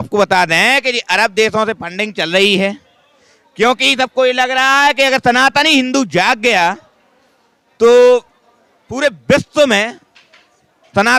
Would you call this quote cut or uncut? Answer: uncut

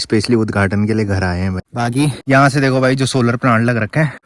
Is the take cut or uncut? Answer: uncut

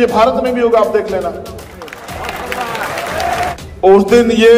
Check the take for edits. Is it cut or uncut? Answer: cut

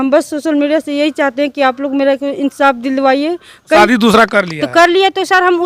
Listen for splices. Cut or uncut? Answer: cut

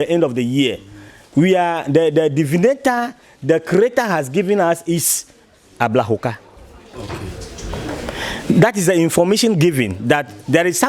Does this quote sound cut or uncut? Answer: uncut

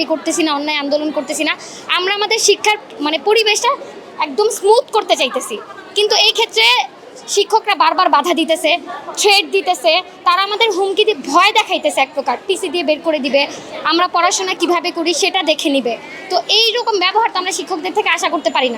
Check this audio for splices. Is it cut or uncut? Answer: uncut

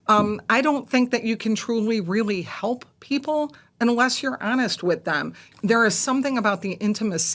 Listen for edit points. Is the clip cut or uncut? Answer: cut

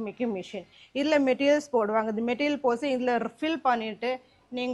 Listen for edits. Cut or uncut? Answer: uncut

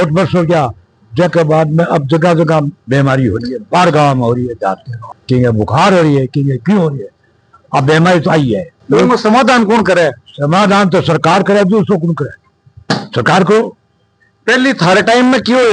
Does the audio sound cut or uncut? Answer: uncut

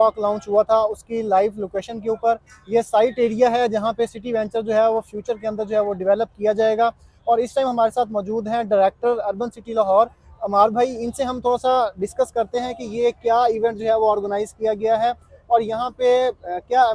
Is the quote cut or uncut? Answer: uncut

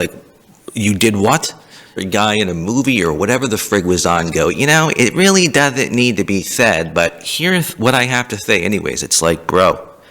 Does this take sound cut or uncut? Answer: cut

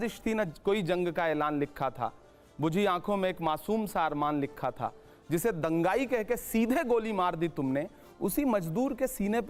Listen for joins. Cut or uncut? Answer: uncut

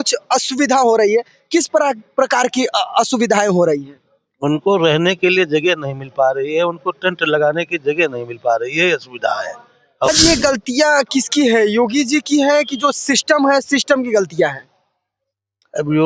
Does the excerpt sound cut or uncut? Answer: cut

